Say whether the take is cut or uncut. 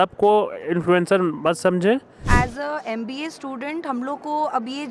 cut